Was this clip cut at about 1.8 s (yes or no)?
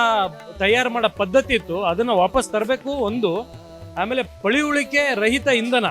no